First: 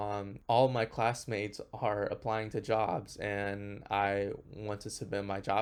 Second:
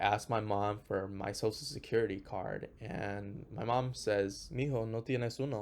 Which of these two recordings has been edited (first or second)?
second